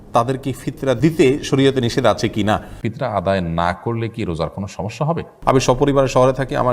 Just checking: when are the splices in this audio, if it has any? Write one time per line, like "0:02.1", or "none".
0:01.0
0:02.8
0:05.3